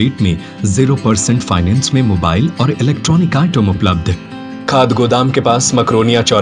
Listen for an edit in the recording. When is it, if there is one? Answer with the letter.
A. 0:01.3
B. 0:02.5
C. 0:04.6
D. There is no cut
C